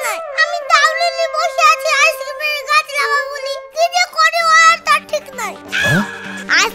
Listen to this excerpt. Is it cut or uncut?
uncut